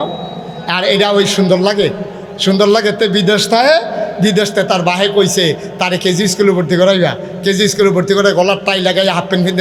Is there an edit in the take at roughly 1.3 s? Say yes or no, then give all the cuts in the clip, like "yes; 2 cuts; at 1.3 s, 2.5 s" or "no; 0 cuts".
no; 0 cuts